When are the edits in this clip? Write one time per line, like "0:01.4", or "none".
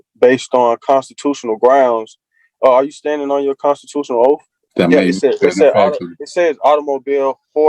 0:04.6